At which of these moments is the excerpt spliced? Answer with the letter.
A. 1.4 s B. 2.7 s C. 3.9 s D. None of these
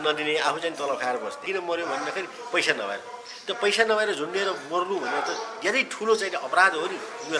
A